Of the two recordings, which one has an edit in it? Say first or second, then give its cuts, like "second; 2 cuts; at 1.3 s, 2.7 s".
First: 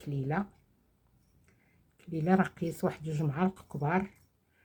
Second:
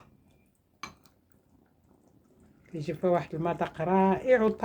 second; 1 cut; at 2.2 s